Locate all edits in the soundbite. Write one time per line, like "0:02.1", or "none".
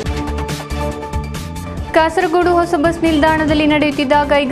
0:00.9